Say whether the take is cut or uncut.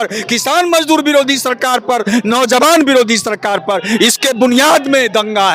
uncut